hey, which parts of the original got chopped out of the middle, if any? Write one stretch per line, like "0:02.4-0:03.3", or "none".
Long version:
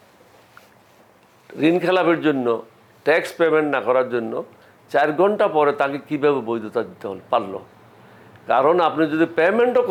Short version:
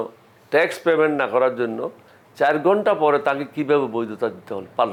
none